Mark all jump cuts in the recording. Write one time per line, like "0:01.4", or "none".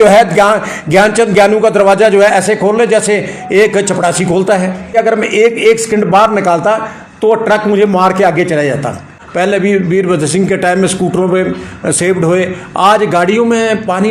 0:04.9
0:09.2